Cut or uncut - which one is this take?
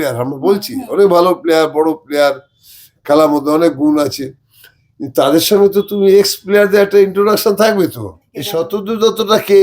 cut